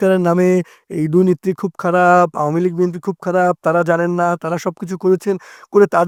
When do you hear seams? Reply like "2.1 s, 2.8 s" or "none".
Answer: none